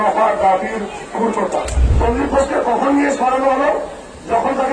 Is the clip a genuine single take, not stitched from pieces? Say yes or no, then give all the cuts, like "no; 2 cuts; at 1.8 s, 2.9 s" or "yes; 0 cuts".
no; 1 cut; at 1.8 s